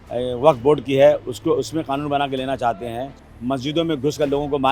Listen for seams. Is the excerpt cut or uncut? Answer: cut